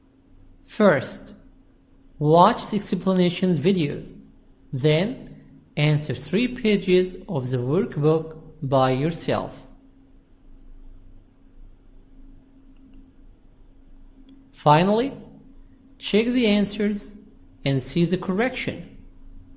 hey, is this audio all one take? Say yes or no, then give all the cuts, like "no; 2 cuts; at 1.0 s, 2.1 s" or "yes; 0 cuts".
no; 1 cut; at 12.3 s